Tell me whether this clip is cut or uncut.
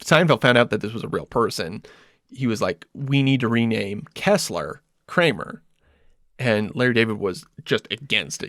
uncut